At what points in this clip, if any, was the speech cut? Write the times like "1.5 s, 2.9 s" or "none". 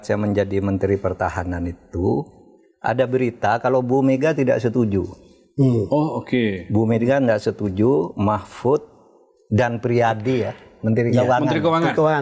none